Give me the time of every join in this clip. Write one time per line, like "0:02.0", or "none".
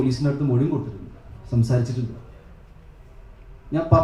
none